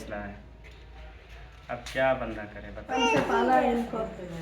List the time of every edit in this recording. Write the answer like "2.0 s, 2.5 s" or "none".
2.9 s